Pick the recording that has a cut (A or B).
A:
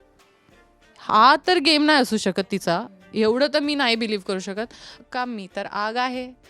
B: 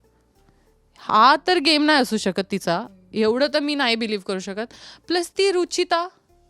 A